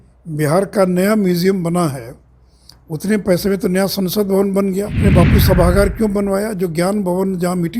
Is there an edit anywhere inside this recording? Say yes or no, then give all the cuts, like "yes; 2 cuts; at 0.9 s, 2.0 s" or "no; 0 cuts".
yes; 1 cut; at 5.0 s